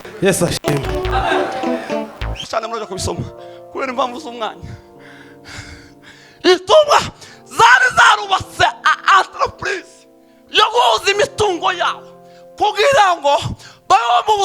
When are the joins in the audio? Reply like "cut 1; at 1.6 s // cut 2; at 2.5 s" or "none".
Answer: cut 1; at 2.4 s

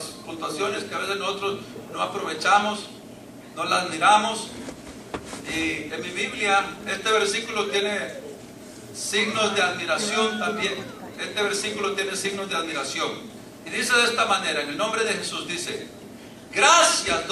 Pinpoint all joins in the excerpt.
cut 1; at 7.8 s

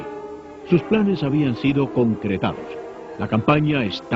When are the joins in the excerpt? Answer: cut 1; at 3.1 s

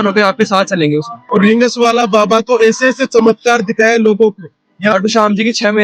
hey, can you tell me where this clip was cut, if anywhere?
cut 1; at 1.2 s // cut 2; at 4.9 s

